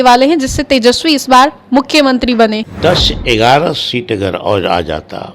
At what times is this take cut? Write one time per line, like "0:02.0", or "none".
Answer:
0:02.7